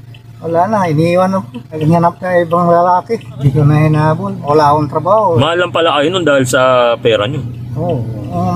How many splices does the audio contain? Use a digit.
2